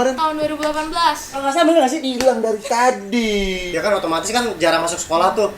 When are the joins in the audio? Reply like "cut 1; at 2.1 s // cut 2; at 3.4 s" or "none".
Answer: cut 1; at 1.4 s // cut 2; at 3.7 s